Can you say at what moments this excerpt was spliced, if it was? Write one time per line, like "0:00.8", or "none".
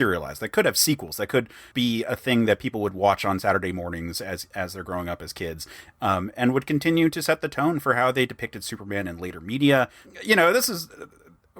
0:10.1